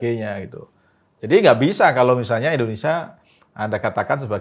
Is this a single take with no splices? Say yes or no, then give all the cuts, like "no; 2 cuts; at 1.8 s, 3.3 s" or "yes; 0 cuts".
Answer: yes; 0 cuts